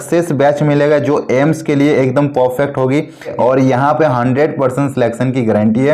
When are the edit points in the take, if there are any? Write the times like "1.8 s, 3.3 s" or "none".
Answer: 3.3 s